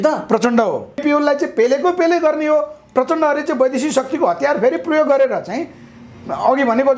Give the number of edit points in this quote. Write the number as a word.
one